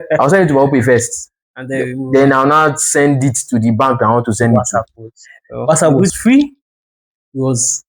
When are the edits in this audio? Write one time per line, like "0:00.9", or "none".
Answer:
0:04.6